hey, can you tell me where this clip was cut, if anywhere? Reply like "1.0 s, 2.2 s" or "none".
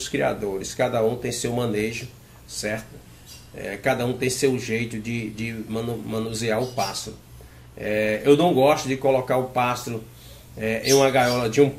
none